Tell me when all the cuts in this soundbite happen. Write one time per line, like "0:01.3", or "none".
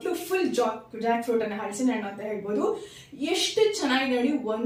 none